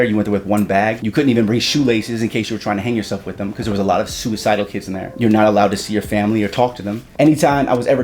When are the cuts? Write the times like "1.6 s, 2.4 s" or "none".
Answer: 1.0 s, 5.1 s, 7.0 s